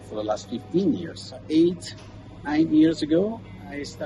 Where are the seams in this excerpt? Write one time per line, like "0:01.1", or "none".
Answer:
0:01.4